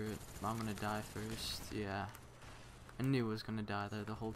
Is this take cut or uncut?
cut